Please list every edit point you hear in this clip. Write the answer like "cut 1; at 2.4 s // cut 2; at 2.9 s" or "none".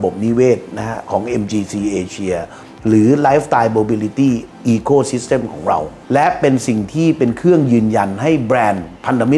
cut 1; at 6.0 s

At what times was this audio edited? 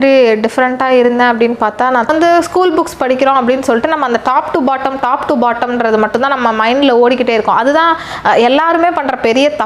cut 1; at 2.1 s

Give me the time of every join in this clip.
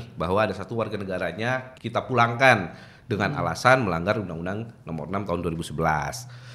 cut 1; at 1.7 s

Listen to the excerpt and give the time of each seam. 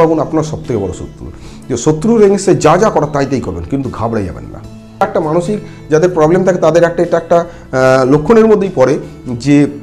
cut 1; at 5.0 s

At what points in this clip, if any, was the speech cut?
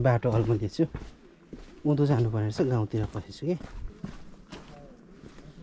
cut 1; at 3.9 s

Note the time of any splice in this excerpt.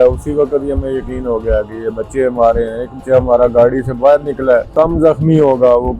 cut 1; at 3.0 s // cut 2; at 4.7 s

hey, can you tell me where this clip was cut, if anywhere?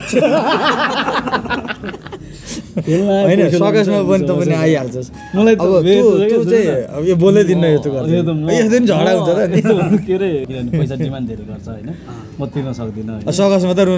cut 1; at 10.5 s

